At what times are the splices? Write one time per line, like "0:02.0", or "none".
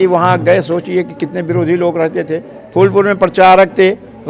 none